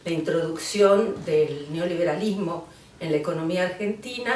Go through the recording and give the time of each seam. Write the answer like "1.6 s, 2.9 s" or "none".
3.3 s

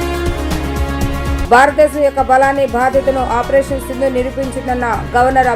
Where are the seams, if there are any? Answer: 1.3 s

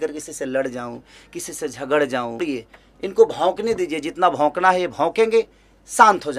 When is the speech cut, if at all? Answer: 2.4 s

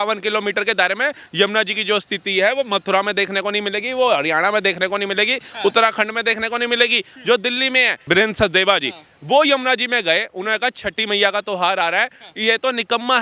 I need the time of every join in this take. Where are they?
8.0 s

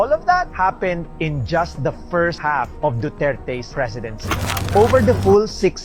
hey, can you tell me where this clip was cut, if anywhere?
4.7 s

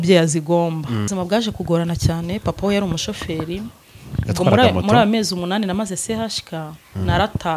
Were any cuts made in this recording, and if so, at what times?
1.1 s

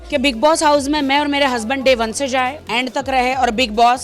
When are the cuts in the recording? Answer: 2.6 s

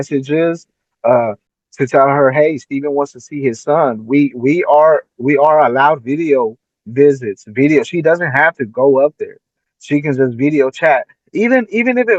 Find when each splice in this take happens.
none

